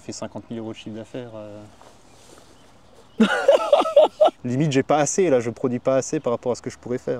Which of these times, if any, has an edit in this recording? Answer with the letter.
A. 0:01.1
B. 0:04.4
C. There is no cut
B